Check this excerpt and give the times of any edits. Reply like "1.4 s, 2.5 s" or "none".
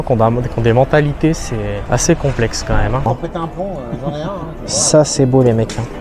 1.8 s, 3.1 s